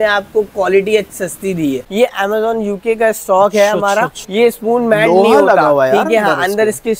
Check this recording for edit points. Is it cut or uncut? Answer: cut